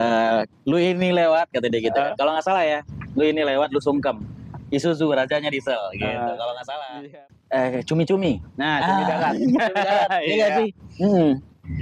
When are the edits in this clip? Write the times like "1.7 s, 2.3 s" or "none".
7.0 s